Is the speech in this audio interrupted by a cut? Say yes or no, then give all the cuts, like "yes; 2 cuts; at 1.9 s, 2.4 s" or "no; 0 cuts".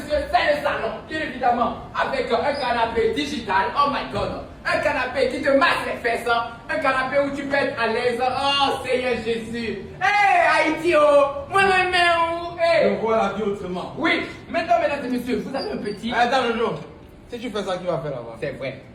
no; 0 cuts